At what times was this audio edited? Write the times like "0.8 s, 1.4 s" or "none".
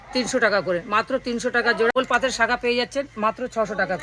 1.9 s